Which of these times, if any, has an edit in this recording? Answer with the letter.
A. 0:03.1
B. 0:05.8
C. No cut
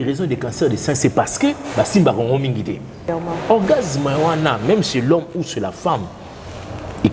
A